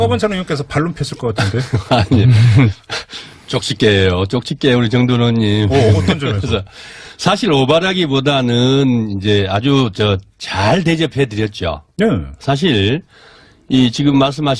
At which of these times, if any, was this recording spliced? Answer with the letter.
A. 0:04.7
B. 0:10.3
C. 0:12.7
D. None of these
A